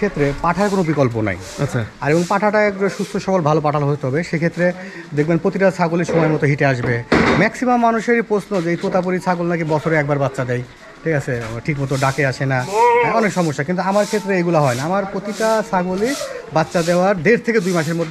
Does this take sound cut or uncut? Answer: uncut